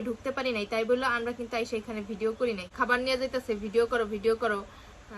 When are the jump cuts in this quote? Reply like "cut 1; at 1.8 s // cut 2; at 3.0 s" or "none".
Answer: cut 1; at 2.7 s